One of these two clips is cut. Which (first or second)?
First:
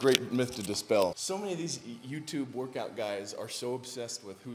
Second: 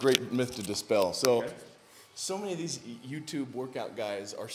first